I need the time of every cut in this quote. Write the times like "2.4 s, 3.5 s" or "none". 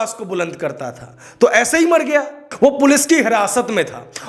2.4 s